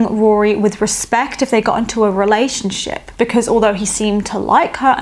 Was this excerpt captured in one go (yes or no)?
yes